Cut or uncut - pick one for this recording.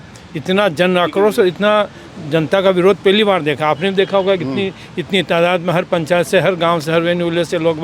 uncut